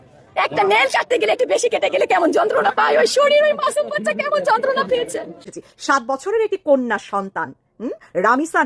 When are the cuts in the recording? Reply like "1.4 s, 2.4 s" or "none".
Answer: 5.3 s